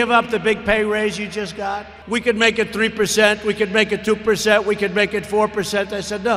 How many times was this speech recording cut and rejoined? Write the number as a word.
one